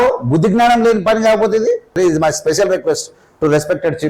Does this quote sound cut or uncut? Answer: cut